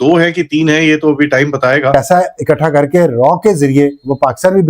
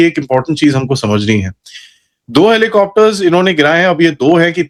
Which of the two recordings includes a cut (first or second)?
first